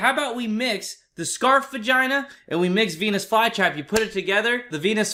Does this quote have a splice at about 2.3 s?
no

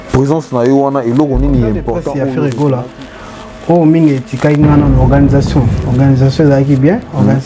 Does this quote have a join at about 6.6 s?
no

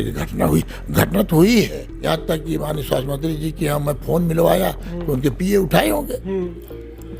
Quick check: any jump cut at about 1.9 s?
yes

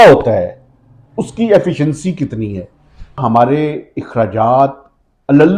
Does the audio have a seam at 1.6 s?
no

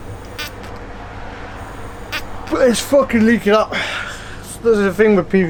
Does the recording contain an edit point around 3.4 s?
no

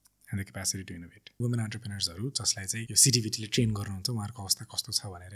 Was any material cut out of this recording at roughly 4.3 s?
no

